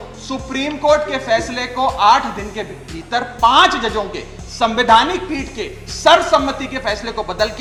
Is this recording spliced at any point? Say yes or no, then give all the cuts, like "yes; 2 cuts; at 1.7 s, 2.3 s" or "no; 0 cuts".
no; 0 cuts